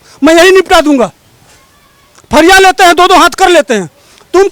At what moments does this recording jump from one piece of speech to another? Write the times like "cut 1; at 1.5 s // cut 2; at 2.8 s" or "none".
none